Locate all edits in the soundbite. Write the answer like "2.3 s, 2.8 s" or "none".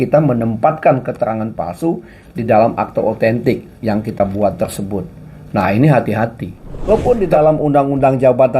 6.9 s